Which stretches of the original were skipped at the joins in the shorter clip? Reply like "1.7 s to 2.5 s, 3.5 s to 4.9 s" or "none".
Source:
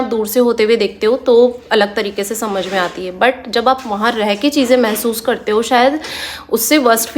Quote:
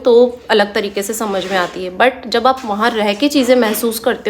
none